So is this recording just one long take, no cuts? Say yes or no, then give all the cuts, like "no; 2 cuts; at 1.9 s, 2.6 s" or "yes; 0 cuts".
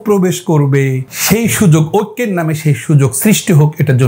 no; 1 cut; at 1.1 s